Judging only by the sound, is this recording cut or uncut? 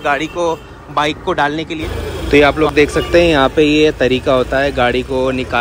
cut